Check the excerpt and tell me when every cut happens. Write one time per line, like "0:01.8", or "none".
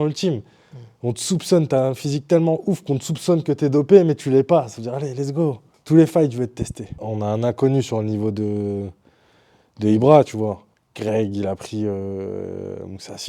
0:05.7
0:07.0
0:10.7